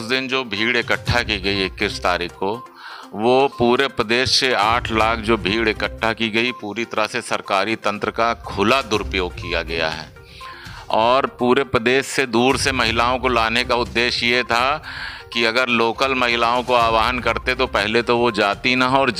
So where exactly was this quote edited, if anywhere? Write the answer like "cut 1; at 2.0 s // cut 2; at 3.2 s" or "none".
none